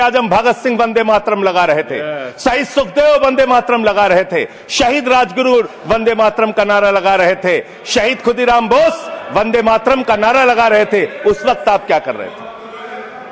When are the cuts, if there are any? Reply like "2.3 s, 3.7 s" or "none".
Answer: none

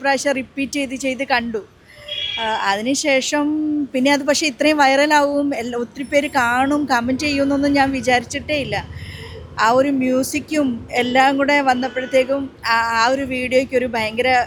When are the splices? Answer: none

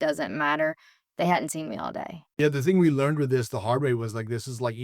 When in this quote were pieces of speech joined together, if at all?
2.2 s

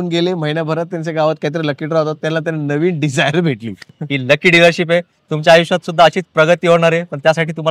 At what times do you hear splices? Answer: 3.9 s

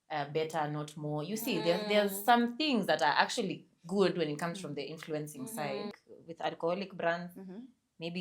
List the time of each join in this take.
6.0 s

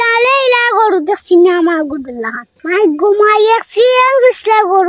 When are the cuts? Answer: none

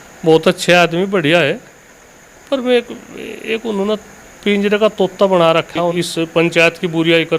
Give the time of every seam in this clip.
5.9 s

